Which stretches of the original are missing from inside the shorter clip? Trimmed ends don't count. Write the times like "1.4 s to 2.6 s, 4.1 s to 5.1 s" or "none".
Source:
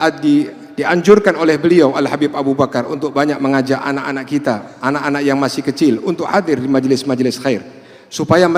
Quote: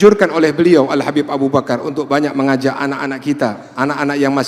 none

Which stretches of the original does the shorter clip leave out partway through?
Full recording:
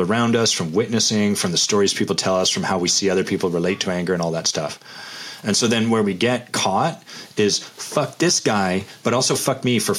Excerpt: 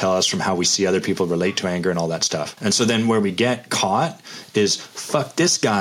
4.7 s to 5.3 s

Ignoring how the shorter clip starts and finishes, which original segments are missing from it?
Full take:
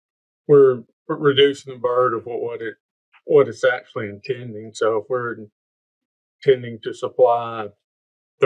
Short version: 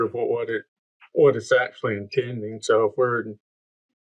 none

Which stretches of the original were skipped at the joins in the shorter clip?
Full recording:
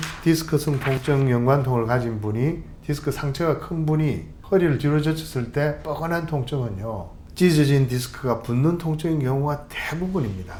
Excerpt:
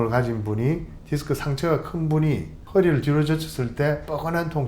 none

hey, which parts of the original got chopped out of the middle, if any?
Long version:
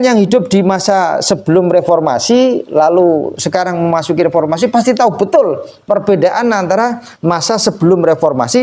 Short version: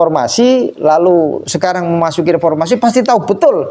none

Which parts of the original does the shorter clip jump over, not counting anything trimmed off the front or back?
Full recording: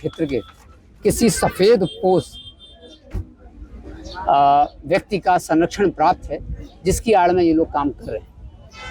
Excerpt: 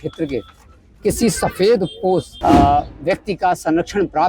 2.3 s to 4.2 s

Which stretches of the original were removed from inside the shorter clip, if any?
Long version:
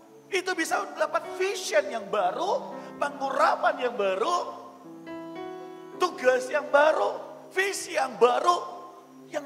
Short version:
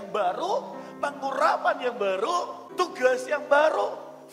4.6 s to 5.8 s

